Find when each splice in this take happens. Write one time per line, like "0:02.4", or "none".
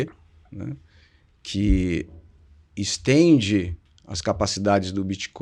none